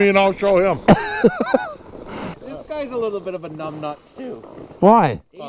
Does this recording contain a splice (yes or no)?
yes